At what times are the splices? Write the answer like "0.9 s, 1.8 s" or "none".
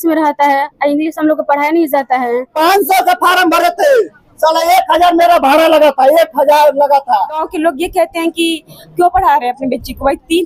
2.5 s, 7.5 s